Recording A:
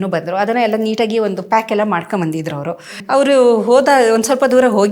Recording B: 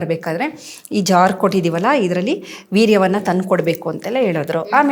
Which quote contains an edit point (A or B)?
A